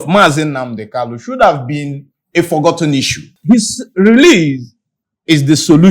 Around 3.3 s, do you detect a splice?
yes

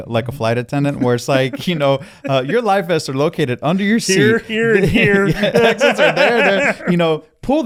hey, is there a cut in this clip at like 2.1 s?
no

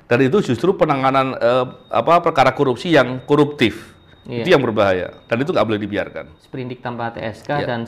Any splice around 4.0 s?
no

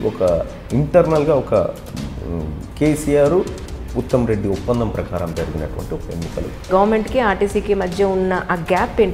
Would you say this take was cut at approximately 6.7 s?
yes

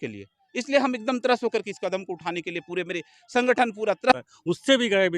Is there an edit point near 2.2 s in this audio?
no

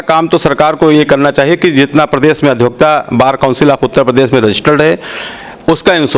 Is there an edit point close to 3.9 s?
no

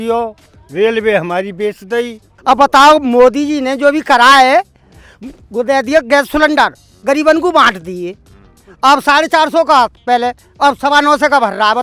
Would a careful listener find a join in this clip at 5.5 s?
no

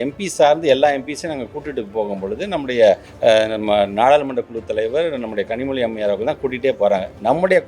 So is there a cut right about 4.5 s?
no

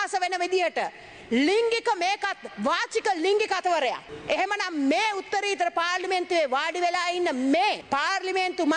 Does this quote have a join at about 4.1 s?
yes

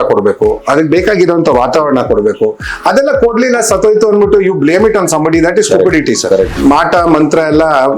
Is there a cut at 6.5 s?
yes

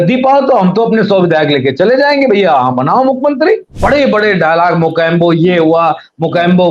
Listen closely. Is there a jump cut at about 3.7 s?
yes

